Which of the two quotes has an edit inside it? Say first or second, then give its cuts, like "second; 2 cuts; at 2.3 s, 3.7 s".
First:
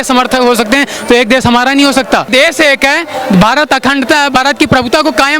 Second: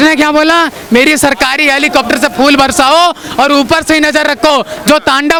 first; 1 cut; at 2.3 s